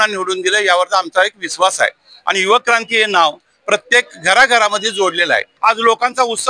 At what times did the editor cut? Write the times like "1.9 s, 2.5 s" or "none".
5.5 s